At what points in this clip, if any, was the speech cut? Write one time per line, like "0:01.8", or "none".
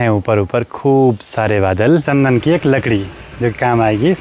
0:02.0